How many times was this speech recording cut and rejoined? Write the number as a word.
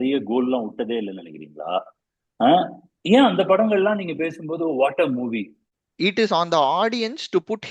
one